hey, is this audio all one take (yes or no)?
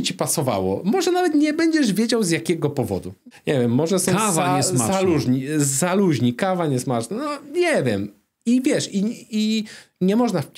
no